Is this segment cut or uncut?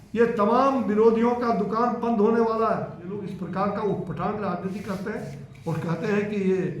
cut